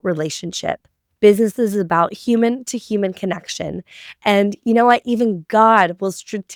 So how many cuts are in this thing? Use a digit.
0